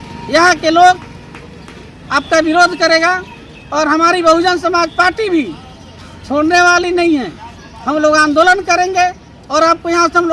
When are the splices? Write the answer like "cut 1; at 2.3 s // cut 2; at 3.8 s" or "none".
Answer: none